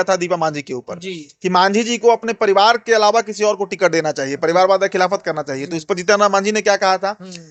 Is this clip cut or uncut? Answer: uncut